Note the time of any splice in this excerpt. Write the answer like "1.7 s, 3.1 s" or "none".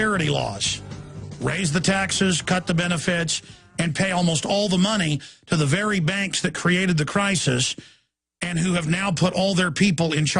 6.3 s